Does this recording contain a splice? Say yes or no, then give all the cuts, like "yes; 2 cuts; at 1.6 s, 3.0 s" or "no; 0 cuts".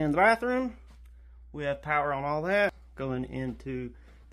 yes; 1 cut; at 2.8 s